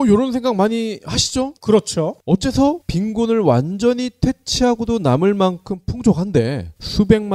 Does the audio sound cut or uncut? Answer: uncut